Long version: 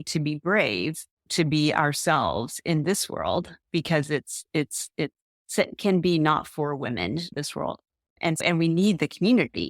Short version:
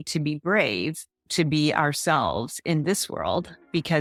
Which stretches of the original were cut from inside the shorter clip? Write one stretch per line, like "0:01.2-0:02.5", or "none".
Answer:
none